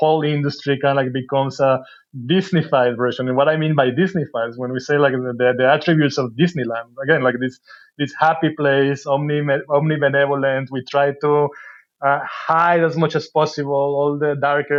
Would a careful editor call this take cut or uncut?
uncut